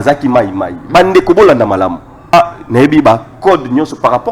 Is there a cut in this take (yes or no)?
yes